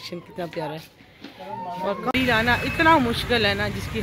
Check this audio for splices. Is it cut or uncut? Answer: cut